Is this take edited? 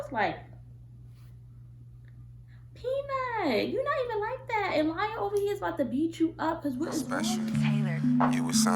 yes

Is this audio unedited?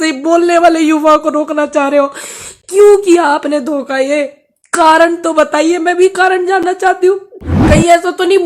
no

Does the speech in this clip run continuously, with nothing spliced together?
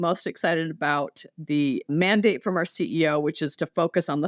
yes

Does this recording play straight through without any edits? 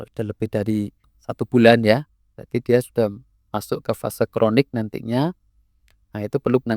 no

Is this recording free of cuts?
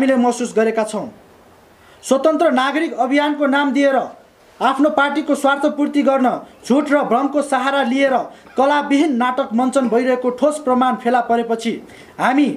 yes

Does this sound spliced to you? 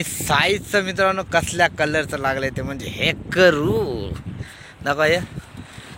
no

